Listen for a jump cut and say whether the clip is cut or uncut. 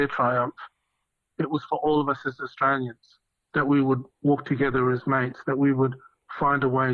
uncut